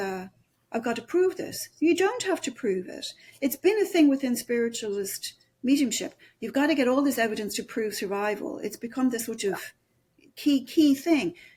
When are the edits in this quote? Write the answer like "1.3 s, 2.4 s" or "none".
none